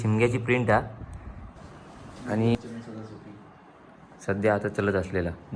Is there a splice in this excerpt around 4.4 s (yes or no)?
no